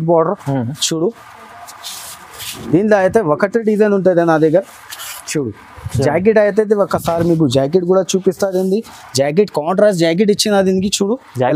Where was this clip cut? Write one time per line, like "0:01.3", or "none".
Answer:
none